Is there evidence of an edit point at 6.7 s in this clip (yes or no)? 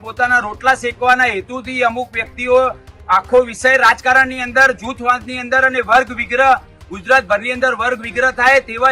no